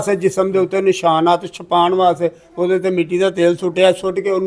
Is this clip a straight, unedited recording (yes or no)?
yes